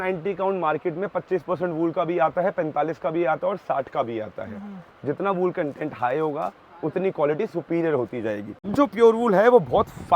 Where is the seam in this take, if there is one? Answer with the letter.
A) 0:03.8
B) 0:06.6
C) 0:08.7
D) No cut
C